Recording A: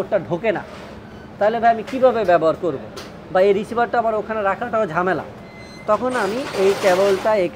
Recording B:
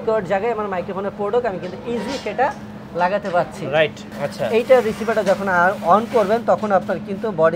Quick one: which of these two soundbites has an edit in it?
B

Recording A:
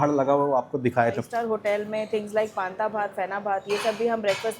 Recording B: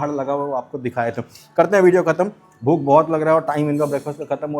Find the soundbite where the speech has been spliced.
A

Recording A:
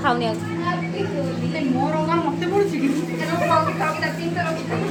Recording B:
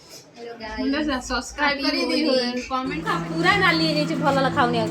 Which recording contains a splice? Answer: B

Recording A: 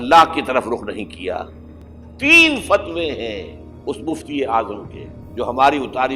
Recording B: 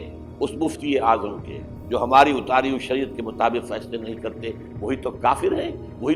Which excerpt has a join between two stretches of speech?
A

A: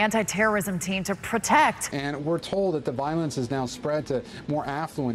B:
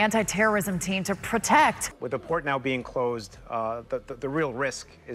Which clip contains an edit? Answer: B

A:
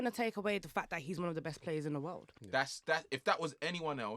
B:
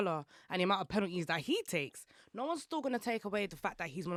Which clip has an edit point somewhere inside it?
A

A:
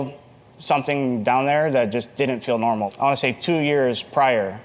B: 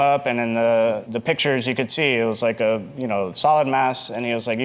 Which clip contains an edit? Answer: A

